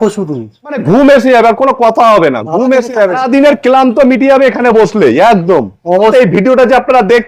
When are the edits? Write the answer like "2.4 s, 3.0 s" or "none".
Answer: 0.8 s, 3.2 s, 6.0 s